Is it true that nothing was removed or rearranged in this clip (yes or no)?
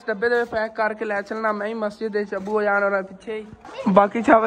yes